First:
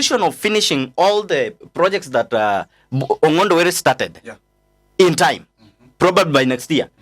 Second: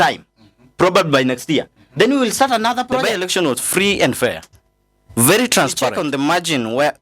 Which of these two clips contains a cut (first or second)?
second